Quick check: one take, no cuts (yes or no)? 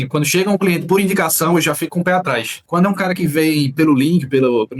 no